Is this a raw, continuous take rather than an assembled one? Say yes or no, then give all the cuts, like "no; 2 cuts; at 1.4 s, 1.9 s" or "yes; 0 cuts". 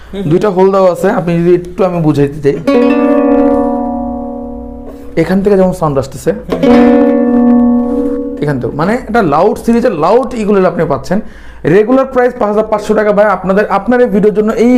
yes; 0 cuts